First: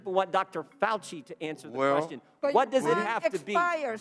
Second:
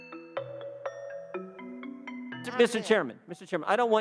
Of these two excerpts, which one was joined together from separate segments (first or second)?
second